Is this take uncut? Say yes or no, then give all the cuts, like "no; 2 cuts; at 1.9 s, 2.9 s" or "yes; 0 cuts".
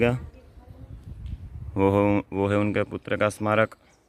yes; 0 cuts